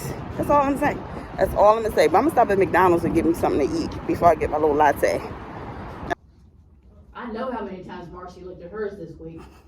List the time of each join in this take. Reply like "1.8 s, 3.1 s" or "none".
6.1 s